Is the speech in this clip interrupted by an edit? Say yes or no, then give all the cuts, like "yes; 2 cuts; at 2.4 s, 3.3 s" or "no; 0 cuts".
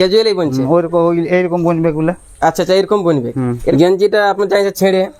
yes; 1 cut; at 3.7 s